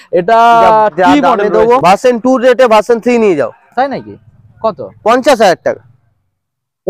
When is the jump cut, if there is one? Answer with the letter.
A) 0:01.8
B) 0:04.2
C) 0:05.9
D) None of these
A